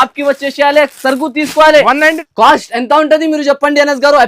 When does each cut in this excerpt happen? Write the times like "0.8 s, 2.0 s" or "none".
2.2 s